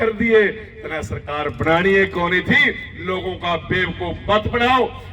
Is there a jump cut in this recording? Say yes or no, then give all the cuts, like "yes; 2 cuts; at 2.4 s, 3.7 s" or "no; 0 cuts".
no; 0 cuts